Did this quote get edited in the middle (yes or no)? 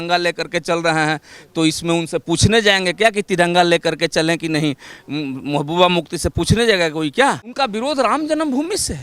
yes